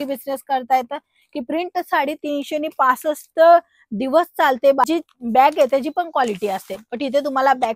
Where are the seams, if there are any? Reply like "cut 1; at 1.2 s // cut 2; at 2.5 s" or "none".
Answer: cut 1; at 4.9 s

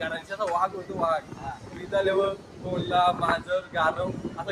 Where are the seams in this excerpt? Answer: none

